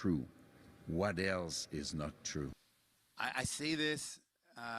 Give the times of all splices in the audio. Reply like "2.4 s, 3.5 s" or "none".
2.6 s